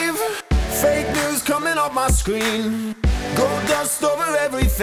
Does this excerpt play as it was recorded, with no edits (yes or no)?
yes